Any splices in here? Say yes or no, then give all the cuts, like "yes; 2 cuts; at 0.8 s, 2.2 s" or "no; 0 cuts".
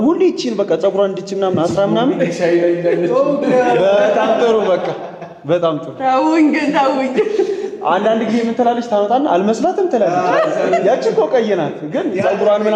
no; 0 cuts